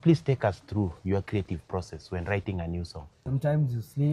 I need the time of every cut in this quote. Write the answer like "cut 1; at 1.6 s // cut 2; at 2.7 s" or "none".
cut 1; at 3.2 s